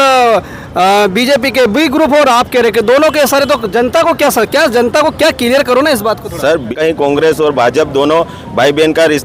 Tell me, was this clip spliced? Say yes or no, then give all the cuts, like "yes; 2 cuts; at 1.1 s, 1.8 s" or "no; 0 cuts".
yes; 1 cut; at 6.7 s